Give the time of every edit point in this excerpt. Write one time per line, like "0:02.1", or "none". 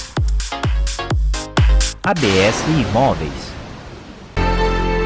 none

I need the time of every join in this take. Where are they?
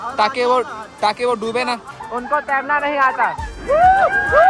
0:02.0
0:03.5

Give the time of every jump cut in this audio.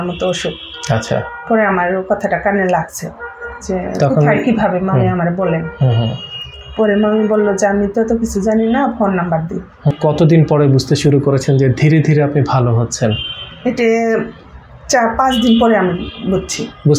0:10.0

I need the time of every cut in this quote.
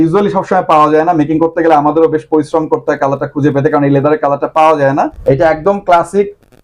0:05.2

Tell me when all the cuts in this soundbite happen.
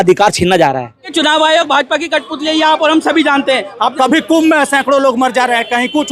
0:01.1
0:03.7

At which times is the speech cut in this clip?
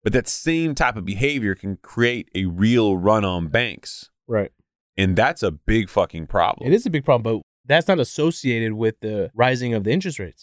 0:07.5
0:09.3

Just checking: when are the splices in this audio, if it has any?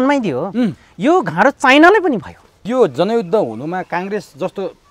0:02.6

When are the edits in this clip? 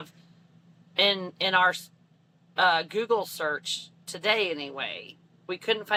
none

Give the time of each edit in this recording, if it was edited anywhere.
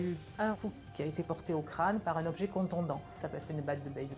0:03.2

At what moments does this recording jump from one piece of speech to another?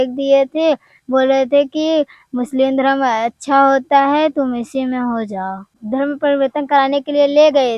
0:05.7

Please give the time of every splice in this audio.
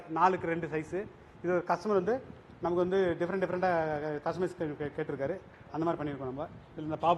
none

